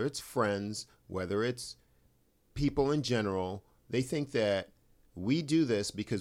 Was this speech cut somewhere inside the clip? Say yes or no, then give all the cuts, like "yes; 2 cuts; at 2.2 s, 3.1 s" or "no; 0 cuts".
no; 0 cuts